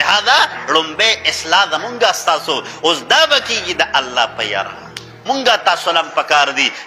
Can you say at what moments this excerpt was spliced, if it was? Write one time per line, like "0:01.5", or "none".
0:05.1